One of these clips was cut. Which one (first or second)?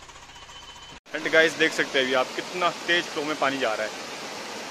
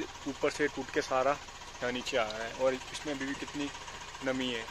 first